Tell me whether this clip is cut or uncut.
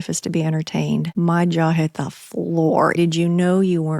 cut